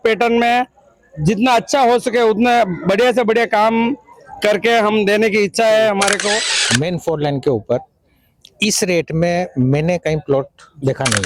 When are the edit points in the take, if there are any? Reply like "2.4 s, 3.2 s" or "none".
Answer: 6.5 s